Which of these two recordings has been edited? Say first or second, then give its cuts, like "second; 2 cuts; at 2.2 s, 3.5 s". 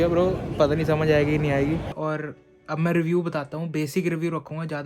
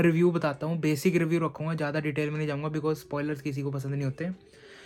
first; 1 cut; at 1.9 s